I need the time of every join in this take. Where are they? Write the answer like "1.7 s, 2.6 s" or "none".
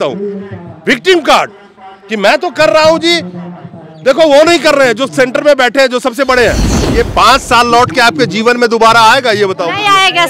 6.8 s